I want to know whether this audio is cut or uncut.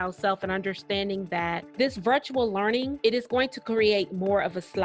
cut